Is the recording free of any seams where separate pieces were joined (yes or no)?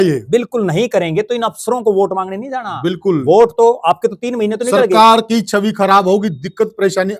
yes